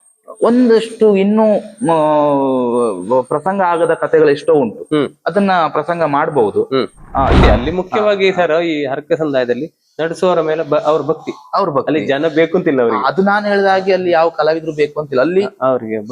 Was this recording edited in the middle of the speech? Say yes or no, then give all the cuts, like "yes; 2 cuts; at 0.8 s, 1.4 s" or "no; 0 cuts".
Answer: yes; 1 cut; at 7.4 s